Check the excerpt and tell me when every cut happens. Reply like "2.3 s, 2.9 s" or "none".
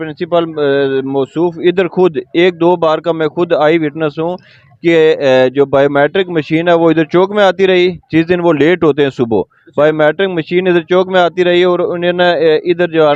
none